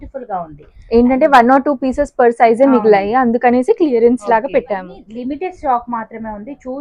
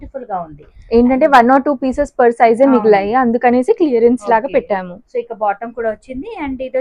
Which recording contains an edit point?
first; 1 cut; at 5.0 s

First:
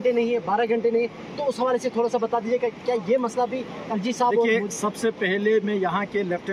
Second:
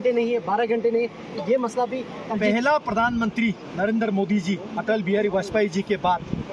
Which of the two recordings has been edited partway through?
second; 2 cuts; at 1.4 s, 2.4 s

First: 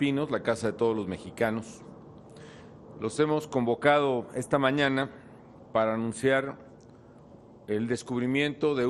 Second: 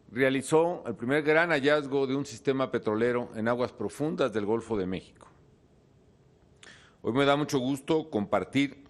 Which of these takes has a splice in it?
second; 1 cut; at 4.6 s

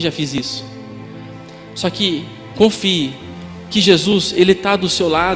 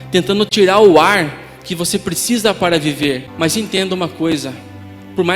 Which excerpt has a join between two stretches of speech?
second; 1 cut; at 3.3 s

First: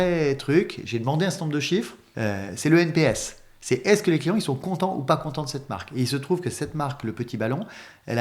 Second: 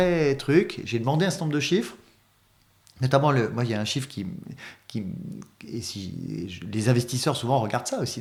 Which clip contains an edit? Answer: first; 1 cut; at 2.0 s

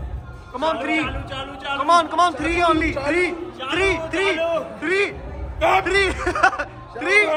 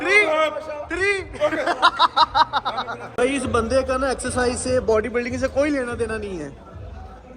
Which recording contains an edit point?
second; 1 cut; at 3.0 s

